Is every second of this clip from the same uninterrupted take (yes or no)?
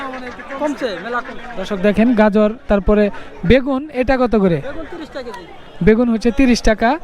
yes